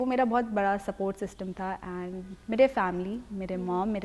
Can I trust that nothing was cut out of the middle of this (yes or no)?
yes